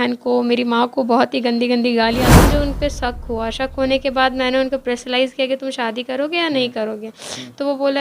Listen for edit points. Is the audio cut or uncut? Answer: cut